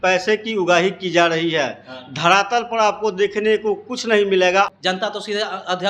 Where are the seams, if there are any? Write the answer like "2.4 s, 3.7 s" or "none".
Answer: 4.7 s